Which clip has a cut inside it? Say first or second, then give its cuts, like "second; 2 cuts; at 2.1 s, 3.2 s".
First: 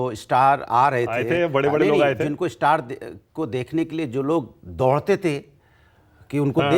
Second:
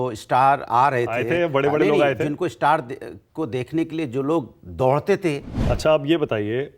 second; 1 cut; at 5.6 s